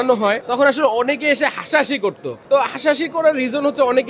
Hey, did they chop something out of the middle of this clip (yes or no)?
no